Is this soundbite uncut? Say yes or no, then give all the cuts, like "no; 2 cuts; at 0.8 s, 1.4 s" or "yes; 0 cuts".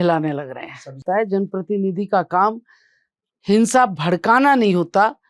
no; 1 cut; at 1.0 s